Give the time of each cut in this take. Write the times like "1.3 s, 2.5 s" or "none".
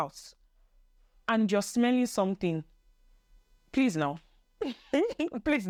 none